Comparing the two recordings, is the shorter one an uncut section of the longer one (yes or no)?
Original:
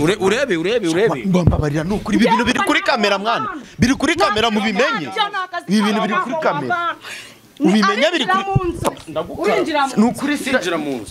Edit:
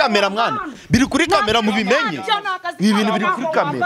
yes